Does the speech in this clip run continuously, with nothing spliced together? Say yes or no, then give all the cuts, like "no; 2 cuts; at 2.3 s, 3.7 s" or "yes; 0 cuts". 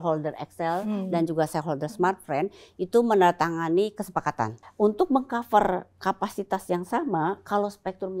no; 1 cut; at 4.6 s